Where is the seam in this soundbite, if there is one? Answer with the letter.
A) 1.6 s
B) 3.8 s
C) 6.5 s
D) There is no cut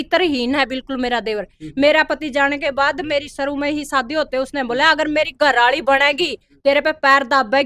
D